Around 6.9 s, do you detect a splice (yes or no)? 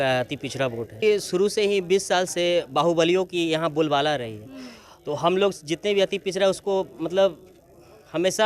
no